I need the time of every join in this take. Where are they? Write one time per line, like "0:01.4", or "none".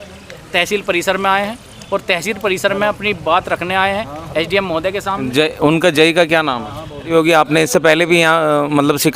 0:07.1